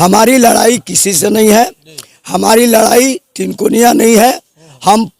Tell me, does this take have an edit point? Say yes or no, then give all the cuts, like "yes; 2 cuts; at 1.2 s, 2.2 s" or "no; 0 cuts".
no; 0 cuts